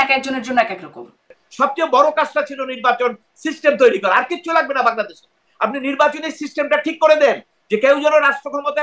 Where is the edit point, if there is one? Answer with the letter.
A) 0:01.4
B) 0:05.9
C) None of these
A